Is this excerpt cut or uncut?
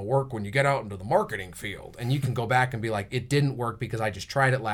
uncut